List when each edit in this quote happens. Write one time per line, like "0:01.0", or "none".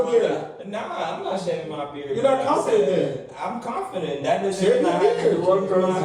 none